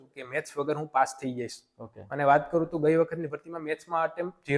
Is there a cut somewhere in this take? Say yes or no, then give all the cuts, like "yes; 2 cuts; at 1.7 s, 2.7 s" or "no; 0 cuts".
no; 0 cuts